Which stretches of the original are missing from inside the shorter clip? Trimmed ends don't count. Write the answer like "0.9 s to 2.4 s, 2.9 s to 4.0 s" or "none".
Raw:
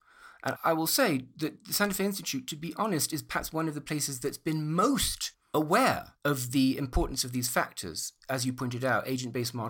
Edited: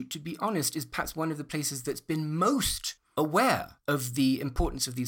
none